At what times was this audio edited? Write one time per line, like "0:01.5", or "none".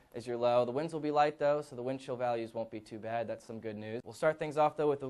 0:04.1